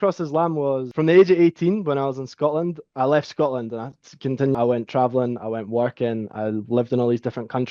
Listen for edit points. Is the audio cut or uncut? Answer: uncut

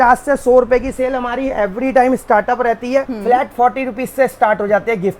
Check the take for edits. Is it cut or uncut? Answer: cut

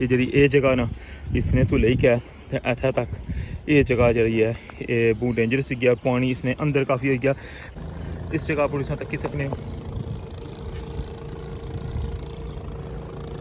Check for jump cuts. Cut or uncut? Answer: cut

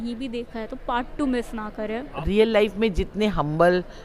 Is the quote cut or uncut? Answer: cut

